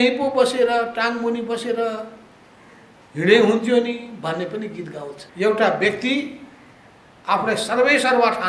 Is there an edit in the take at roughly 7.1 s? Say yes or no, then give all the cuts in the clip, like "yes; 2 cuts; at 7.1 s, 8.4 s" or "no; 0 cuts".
no; 1 cut; at 5.2 s